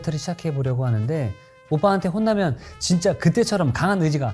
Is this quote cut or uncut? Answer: cut